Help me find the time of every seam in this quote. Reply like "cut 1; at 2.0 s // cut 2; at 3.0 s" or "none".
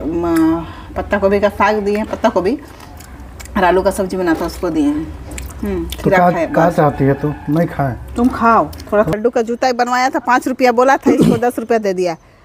cut 1; at 9.1 s